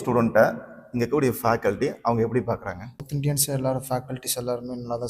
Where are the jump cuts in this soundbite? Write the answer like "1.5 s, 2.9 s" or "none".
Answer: 3.1 s